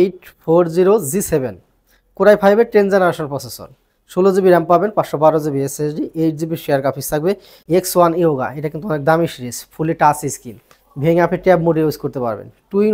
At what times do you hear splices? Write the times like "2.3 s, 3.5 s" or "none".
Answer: 7.5 s